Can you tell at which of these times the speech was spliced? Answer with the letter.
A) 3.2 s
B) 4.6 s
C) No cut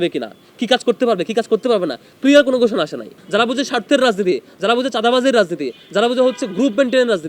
A